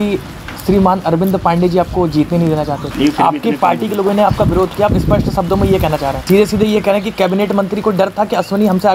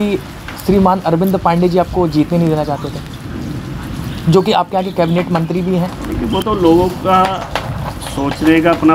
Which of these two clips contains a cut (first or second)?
first